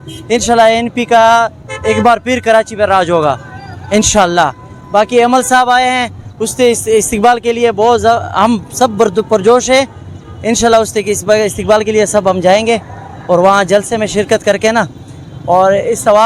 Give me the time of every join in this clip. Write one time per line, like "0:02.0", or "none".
none